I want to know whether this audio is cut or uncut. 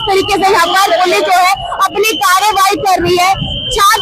uncut